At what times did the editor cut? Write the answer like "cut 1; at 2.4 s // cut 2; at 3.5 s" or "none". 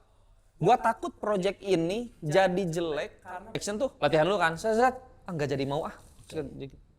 cut 1; at 3.5 s

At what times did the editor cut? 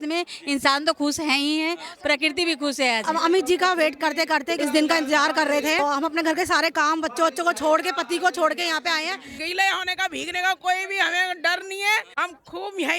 cut 1; at 3.1 s // cut 2; at 4.5 s // cut 3; at 5.8 s // cut 4; at 9.4 s

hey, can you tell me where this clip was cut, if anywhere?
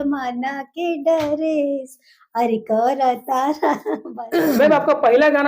cut 1; at 3.9 s

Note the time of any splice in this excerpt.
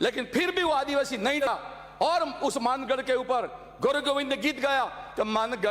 cut 1; at 1.4 s

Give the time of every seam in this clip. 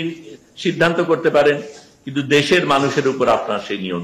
none

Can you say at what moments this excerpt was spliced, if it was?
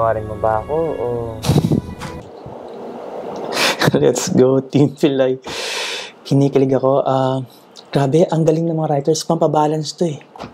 none

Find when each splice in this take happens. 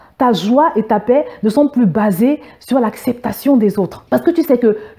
cut 1; at 4.0 s

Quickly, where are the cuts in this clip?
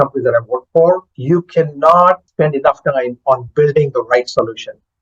cut 1; at 1.1 s // cut 2; at 2.3 s

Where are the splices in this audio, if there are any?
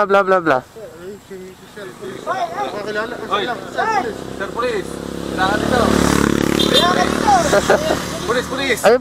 none

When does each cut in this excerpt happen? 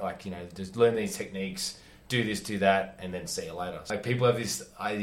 cut 1; at 3.9 s

